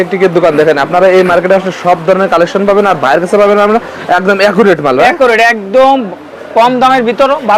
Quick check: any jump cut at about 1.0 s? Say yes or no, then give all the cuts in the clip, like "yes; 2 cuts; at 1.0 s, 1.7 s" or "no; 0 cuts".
no; 0 cuts